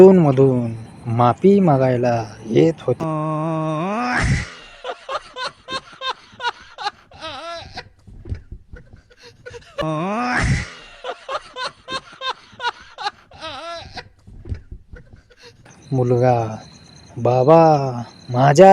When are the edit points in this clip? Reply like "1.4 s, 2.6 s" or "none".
3.0 s, 9.8 s, 15.6 s